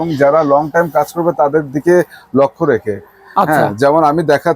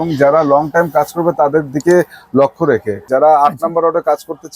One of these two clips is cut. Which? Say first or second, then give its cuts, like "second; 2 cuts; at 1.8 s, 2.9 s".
second; 1 cut; at 3.0 s